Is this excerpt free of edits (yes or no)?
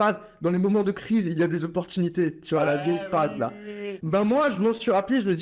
no